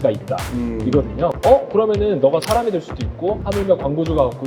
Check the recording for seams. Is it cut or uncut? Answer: cut